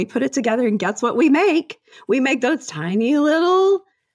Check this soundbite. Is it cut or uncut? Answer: uncut